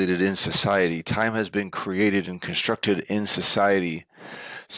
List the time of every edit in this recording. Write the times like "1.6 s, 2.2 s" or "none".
none